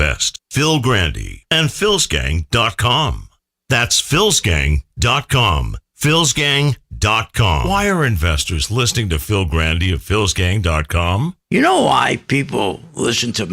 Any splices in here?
yes; 1 cut; at 7.6 s

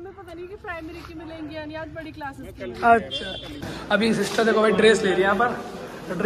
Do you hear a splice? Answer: yes; 1 cut; at 3.8 s

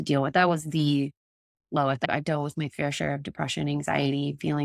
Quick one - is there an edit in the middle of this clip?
yes; 1 cut; at 2.0 s

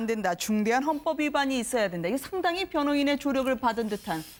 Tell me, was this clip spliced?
no; 0 cuts

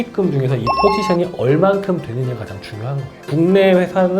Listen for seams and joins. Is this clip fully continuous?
no; 1 cut; at 3.3 s

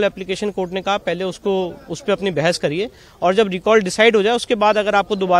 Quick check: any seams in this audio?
no; 0 cuts

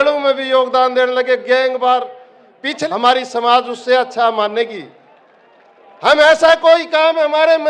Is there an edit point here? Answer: yes; 1 cut; at 2.8 s

